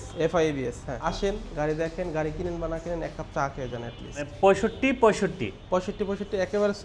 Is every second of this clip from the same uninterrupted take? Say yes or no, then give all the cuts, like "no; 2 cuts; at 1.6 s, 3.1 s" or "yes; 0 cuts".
no; 2 cuts; at 0.9 s, 4.3 s